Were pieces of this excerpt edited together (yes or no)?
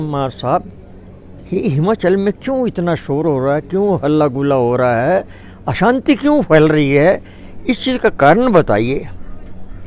no